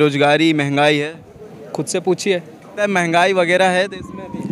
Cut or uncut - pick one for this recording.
cut